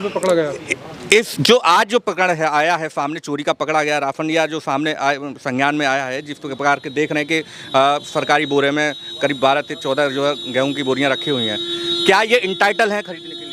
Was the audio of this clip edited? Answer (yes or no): no